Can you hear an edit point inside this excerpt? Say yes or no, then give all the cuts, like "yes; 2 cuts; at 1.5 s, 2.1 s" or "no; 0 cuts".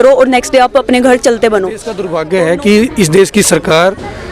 yes; 1 cut; at 2.1 s